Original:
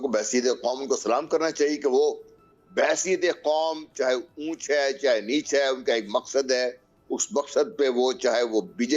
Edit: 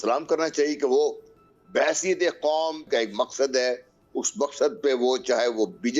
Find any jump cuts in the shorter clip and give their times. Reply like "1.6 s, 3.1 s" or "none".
2.8 s